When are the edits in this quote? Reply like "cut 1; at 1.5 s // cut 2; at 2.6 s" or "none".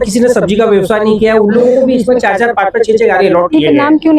none